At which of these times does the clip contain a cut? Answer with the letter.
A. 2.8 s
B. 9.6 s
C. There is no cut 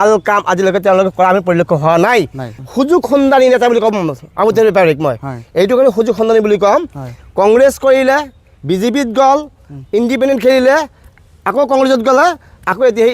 A